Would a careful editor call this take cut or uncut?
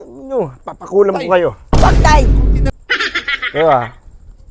cut